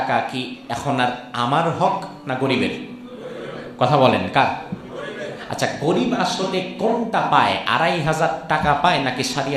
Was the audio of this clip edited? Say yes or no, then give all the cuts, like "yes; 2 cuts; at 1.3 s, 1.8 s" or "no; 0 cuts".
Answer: no; 0 cuts